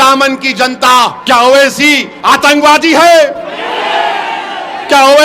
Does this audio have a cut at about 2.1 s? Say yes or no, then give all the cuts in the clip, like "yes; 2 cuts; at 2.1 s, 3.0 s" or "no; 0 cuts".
yes; 2 cuts; at 1.2 s, 2.1 s